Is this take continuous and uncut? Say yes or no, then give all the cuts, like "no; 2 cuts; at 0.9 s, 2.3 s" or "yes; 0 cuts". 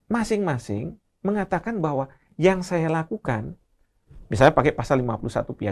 yes; 0 cuts